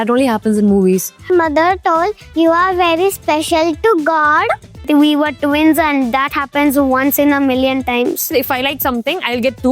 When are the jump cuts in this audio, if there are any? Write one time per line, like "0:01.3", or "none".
0:01.3
0:04.8
0:08.3